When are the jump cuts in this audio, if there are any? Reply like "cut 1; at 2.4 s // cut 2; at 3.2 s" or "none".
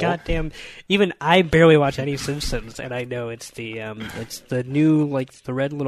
none